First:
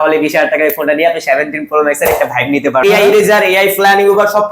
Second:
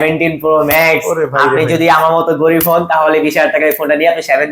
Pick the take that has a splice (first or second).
first